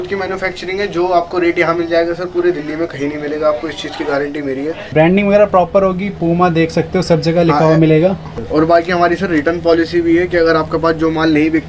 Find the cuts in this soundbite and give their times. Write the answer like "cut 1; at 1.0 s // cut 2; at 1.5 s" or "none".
cut 1; at 4.9 s // cut 2; at 8.3 s